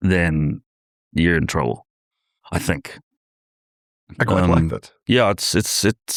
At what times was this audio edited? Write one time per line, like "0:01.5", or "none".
none

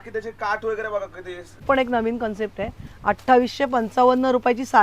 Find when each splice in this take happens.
0:01.6

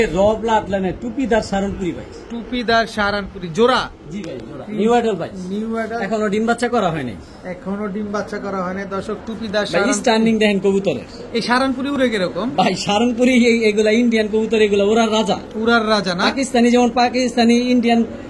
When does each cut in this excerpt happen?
none

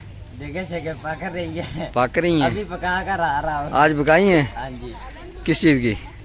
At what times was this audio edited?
none

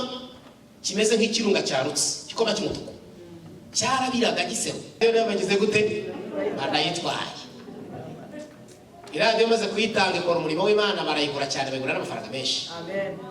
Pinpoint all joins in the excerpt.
0:05.0

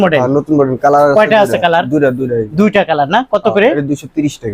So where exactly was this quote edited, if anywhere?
none

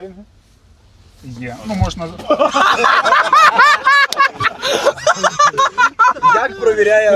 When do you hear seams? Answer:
none

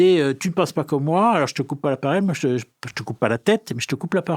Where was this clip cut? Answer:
none

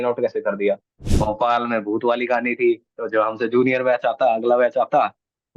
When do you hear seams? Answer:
0:01.0

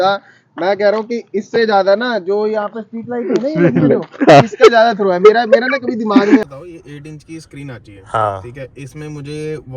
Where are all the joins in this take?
0:06.4

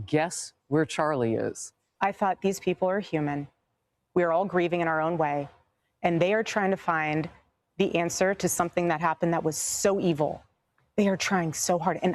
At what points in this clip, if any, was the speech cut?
0:01.8

